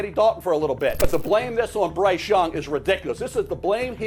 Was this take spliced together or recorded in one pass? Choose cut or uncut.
cut